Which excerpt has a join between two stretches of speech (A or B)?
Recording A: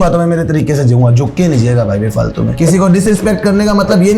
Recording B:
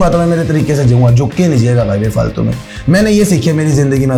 A